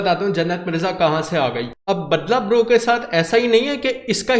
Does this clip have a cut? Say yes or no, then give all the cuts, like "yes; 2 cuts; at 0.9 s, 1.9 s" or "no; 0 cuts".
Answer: no; 0 cuts